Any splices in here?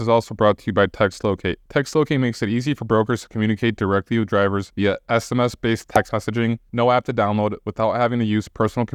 no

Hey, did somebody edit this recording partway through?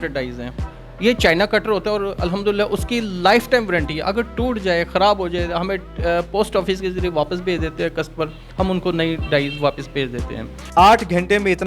yes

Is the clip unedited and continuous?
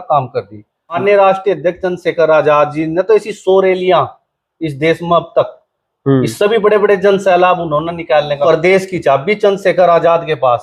no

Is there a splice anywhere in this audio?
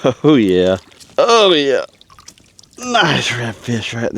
yes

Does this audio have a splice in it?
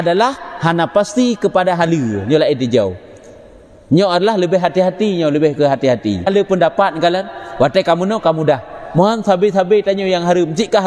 yes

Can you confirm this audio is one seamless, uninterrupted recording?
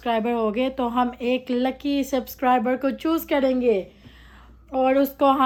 yes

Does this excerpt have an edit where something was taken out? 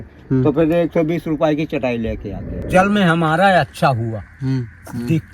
yes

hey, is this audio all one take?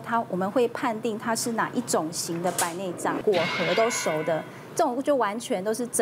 no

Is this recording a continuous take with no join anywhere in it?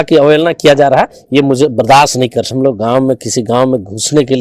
no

